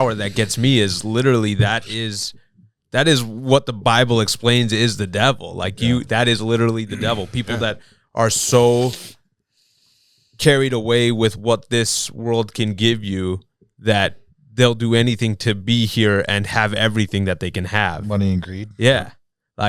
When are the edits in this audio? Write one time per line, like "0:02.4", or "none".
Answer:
none